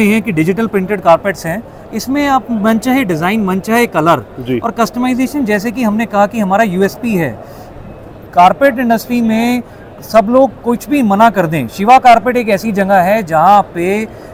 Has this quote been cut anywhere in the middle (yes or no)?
no